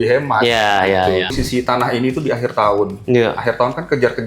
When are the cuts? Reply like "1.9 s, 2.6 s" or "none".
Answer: 1.3 s